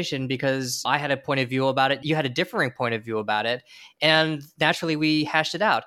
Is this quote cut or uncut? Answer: cut